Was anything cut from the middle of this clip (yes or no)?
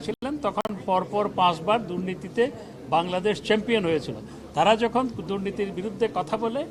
no